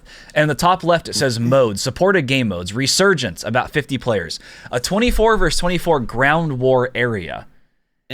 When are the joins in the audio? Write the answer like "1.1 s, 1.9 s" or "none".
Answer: none